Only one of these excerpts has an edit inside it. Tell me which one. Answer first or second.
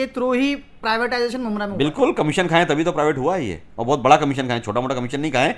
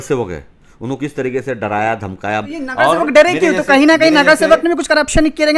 second